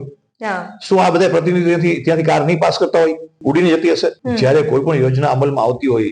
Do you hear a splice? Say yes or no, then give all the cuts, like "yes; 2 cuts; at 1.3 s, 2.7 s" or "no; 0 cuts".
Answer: yes; 2 cuts; at 3.4 s, 4.2 s